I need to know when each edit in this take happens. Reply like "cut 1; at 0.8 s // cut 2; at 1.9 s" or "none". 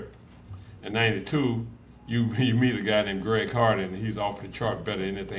none